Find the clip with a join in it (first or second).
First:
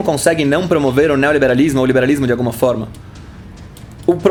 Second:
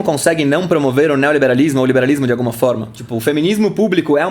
second